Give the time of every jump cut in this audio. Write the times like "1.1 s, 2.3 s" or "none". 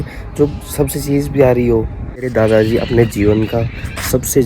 2.3 s